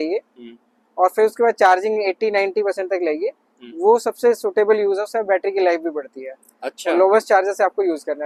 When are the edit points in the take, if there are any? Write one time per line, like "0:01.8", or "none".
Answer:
none